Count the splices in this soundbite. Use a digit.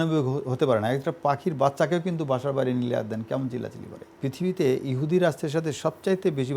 1